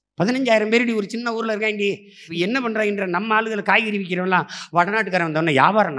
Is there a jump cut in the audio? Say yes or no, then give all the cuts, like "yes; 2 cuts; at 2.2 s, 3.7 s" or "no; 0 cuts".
yes; 1 cut; at 2.2 s